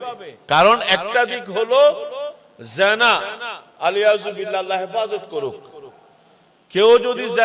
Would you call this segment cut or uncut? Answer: uncut